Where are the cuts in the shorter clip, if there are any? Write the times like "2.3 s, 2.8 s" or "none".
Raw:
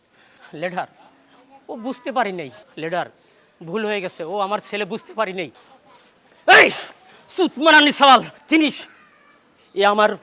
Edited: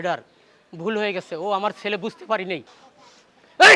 none